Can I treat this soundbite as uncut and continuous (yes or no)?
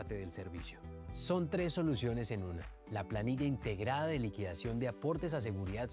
yes